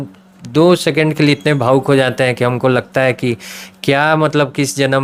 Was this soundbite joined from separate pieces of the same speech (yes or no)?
no